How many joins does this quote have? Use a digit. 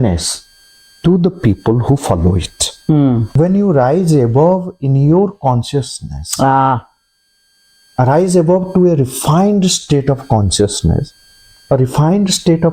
1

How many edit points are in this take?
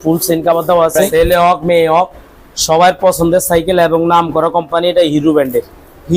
1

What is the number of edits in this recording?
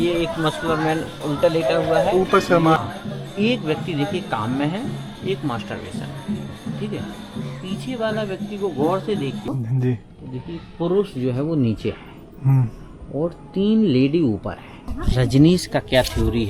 3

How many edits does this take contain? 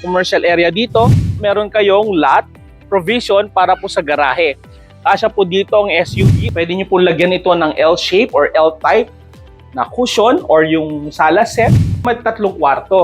3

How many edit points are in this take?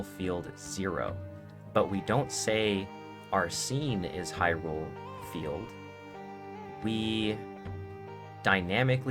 0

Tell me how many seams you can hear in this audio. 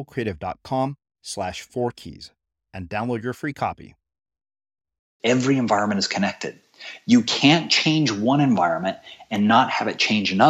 1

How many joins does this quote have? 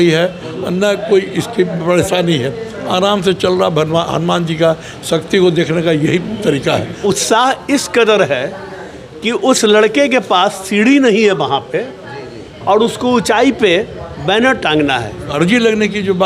2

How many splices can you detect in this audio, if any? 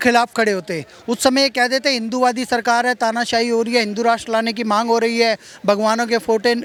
0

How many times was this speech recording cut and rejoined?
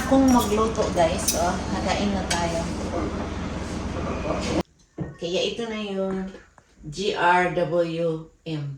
1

